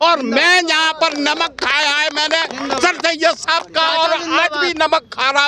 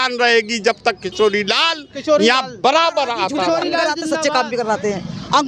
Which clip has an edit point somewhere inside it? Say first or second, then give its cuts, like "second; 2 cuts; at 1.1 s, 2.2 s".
second; 1 cut; at 3.9 s